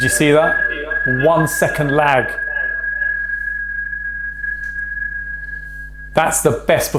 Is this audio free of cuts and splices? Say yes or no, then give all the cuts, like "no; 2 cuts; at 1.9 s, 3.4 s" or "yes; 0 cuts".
yes; 0 cuts